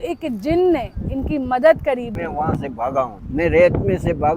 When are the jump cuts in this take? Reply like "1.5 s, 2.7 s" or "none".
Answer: 2.1 s, 3.2 s